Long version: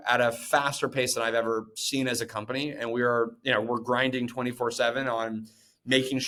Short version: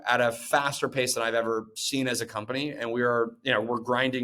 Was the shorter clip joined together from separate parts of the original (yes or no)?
no